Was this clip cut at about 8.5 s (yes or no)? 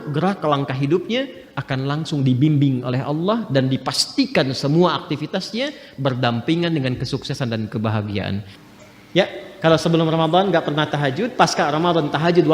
yes